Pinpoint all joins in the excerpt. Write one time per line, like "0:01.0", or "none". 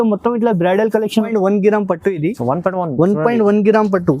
0:01.3